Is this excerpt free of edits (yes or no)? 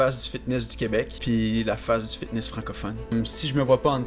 no